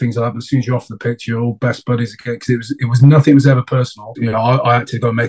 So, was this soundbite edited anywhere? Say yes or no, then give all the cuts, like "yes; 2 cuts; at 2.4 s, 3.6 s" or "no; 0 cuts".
yes; 1 cut; at 4.0 s